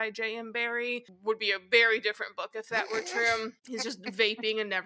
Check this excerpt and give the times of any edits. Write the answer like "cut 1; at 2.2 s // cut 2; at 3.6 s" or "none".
cut 1; at 3.6 s